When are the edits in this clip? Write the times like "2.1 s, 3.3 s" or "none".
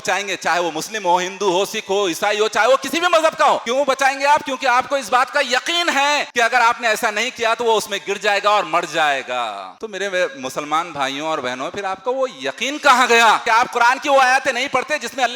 3.6 s, 6.3 s